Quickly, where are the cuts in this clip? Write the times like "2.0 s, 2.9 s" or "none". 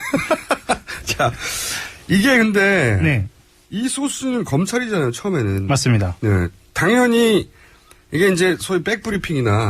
none